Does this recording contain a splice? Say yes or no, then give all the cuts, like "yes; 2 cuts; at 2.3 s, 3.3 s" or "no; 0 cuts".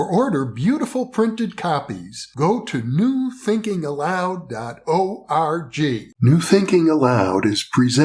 yes; 1 cut; at 6.1 s